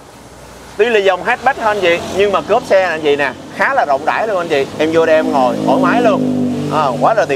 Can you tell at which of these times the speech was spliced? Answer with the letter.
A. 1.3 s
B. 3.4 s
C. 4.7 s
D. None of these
C